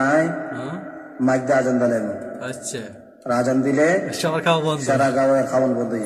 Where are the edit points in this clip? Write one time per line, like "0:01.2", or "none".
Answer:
none